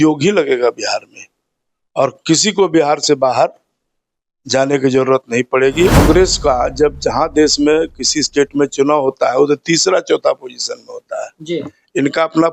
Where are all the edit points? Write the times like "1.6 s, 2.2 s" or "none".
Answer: 6.0 s